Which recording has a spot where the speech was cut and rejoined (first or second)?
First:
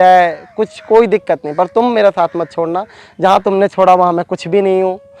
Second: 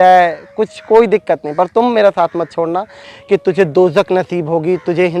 second